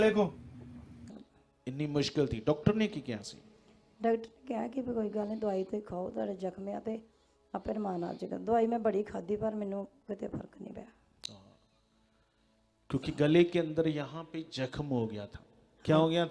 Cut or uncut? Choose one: cut